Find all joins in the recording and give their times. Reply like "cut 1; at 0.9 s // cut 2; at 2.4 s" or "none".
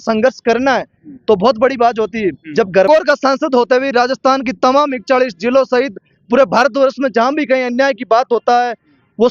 cut 1; at 2.9 s